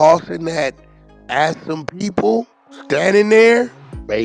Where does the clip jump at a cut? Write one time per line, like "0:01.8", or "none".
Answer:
none

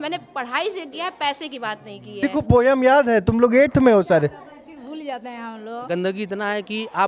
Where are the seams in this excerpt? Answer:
0:02.3
0:05.8

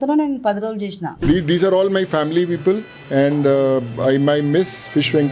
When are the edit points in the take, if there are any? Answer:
0:01.1

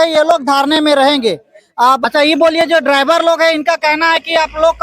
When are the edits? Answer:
0:02.0

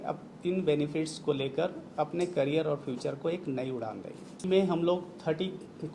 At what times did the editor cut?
0:04.4

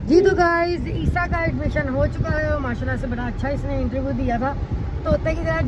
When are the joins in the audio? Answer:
none

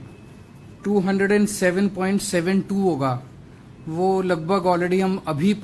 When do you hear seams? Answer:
none

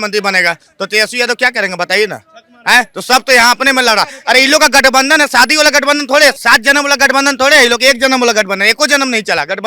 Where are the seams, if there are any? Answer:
none

